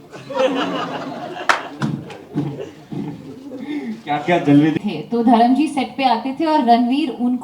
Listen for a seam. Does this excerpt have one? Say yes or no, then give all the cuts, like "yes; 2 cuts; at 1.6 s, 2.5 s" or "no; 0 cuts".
yes; 1 cut; at 4.7 s